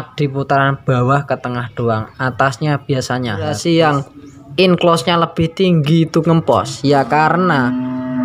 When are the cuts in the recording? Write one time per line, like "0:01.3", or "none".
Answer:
0:03.6